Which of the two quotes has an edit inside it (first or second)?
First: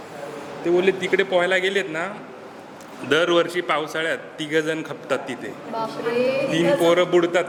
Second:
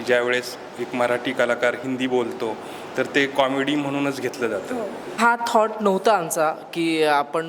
second